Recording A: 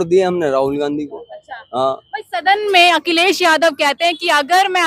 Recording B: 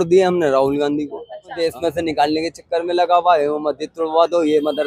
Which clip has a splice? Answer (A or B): B